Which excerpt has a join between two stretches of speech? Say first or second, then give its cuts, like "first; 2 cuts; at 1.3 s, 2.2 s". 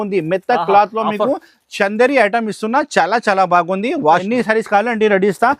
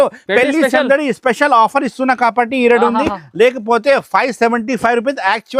first; 1 cut; at 4.2 s